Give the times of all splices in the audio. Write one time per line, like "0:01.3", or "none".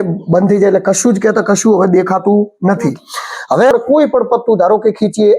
0:03.7